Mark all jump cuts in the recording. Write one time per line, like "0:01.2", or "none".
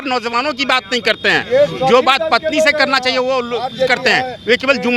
none